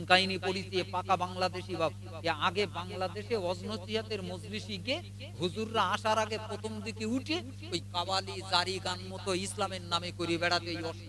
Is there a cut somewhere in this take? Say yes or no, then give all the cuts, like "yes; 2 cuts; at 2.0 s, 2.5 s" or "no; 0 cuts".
no; 0 cuts